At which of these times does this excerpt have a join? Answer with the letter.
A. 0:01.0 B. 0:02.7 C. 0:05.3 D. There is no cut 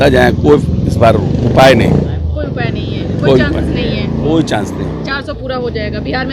D